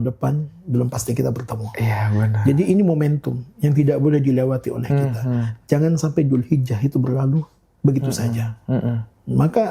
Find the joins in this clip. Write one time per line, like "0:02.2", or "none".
none